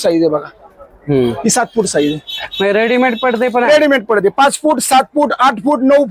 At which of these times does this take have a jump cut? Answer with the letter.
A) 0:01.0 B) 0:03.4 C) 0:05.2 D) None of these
D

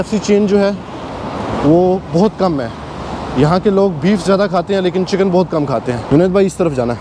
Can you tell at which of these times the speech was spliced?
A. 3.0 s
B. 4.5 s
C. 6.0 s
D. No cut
C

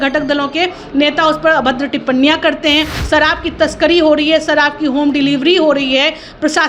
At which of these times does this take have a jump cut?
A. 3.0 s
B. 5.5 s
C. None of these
A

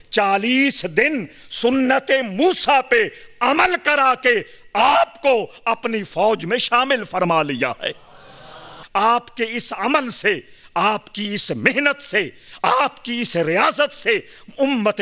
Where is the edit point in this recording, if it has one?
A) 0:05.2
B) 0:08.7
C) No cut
B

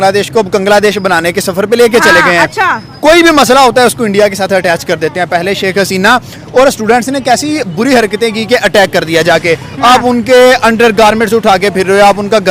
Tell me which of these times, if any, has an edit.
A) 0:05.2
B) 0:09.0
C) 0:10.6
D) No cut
D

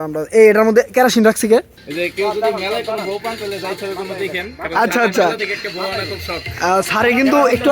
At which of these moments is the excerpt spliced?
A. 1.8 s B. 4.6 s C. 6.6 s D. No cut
A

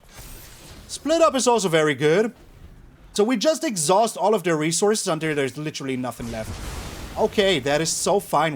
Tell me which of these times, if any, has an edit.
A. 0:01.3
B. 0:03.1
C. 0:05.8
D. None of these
B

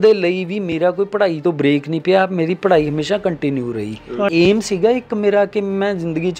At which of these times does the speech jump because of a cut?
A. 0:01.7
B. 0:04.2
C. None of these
B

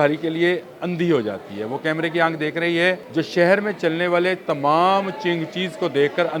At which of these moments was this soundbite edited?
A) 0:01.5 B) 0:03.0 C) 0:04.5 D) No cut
B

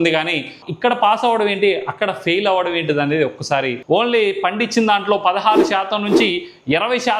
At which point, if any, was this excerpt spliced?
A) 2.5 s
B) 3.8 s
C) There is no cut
B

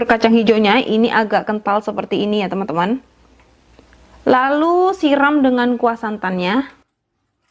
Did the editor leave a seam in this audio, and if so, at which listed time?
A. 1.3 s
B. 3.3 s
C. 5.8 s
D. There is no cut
D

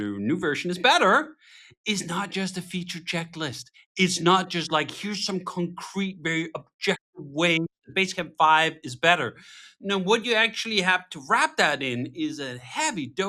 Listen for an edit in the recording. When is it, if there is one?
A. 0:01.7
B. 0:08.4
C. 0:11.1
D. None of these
D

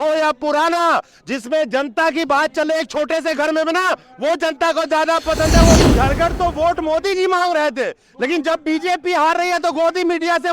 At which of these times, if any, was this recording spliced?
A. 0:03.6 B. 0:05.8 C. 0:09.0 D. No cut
B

